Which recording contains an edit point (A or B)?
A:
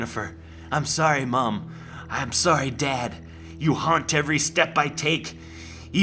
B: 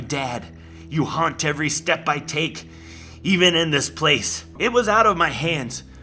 B